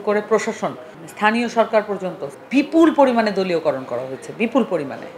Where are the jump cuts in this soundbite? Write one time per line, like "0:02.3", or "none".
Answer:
0:02.4